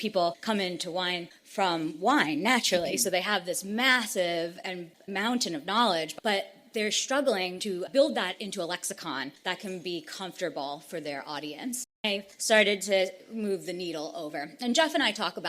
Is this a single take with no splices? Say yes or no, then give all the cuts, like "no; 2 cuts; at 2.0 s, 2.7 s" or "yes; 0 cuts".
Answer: no; 3 cuts; at 5.0 s, 6.1 s, 12.0 s